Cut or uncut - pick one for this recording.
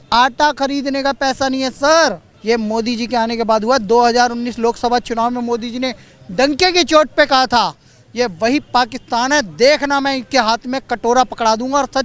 uncut